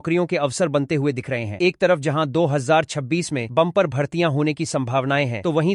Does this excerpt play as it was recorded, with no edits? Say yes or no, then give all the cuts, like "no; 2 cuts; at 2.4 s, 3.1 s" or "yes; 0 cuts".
yes; 0 cuts